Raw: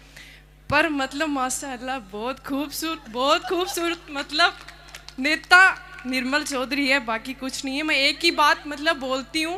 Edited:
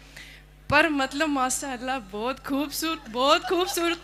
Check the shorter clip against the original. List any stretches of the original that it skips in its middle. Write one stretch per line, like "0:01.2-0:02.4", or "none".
none